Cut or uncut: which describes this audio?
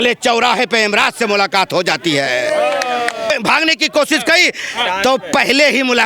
cut